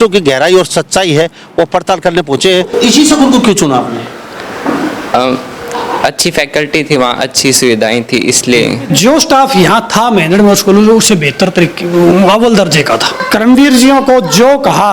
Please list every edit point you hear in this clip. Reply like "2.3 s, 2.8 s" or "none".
2.7 s, 8.8 s, 13.2 s